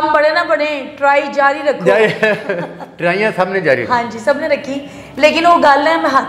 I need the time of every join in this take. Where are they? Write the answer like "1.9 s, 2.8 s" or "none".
none